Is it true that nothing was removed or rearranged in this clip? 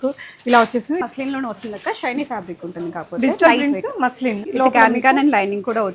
no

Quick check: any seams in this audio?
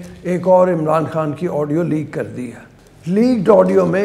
no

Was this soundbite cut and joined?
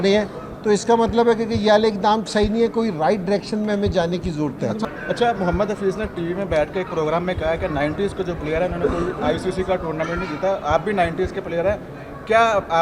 yes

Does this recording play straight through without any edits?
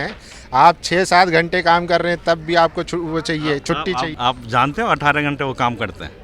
no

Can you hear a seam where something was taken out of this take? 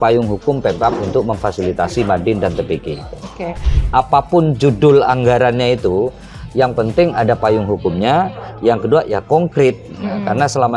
yes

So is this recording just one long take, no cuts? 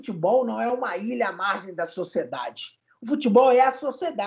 yes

